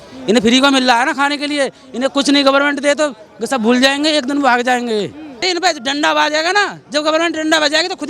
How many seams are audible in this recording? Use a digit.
1